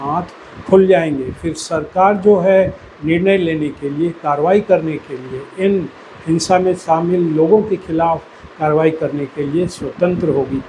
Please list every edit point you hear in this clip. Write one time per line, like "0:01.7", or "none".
none

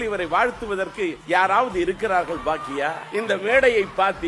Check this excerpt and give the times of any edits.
0:01.2
0:03.0

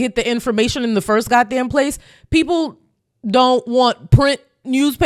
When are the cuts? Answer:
none

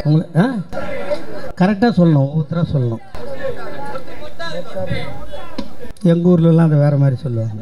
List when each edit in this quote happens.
none

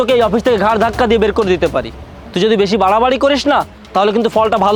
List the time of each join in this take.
none

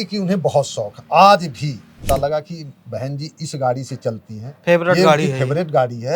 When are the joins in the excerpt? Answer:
0:01.9

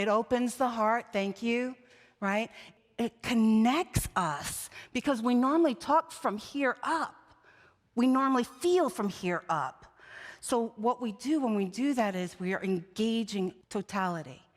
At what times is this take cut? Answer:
0:02.7
0:13.6

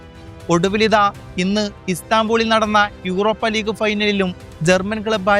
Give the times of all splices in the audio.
0:04.5

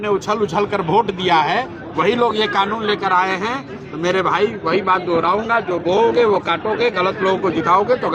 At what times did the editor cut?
none

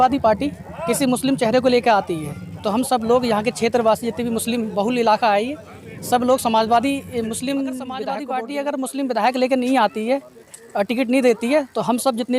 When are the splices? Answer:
0:08.1

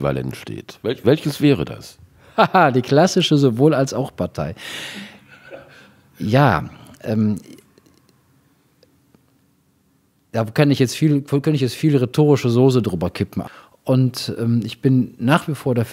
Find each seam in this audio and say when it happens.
0:13.4

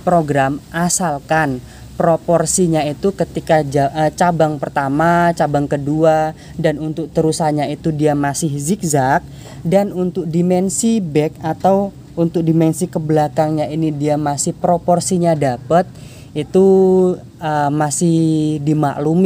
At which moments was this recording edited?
none

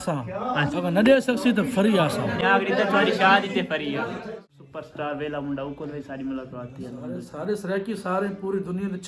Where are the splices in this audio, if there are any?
0:02.4
0:04.2

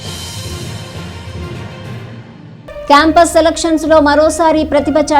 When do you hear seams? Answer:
0:02.5

